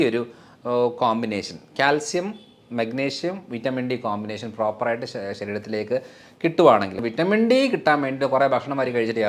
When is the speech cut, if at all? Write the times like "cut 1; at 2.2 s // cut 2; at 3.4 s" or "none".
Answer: cut 1; at 7.0 s